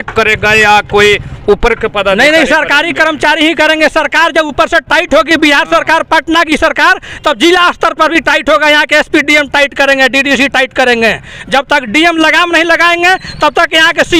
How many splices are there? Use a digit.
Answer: 0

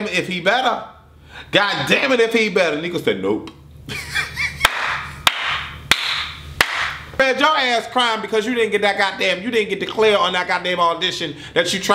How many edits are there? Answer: 1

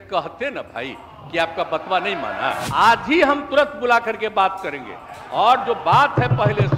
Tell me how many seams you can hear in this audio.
1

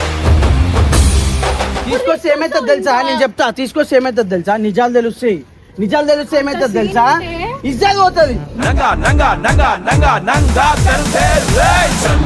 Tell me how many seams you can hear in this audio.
1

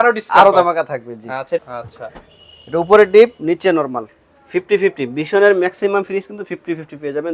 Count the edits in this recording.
1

